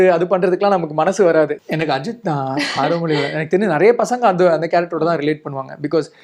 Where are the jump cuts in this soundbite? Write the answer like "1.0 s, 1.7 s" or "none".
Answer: 1.6 s